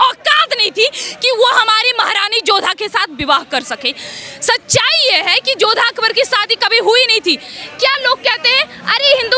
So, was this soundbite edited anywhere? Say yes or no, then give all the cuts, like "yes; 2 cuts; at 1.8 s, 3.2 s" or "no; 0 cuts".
no; 0 cuts